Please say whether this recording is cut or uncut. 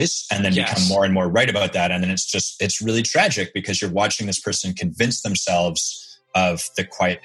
uncut